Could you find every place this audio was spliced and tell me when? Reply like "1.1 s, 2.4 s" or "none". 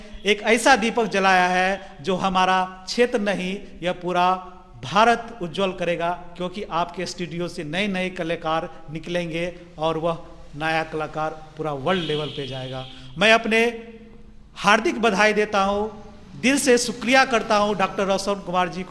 none